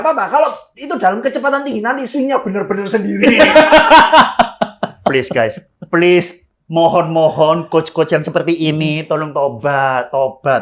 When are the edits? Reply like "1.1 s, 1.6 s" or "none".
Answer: none